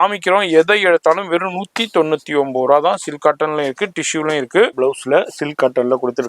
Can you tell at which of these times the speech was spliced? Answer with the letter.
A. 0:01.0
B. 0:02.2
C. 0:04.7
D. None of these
C